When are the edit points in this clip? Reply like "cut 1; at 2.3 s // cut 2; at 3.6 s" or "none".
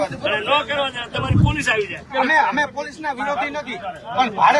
cut 1; at 2.0 s